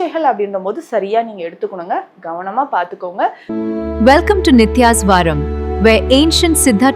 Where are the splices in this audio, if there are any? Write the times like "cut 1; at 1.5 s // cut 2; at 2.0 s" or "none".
cut 1; at 3.4 s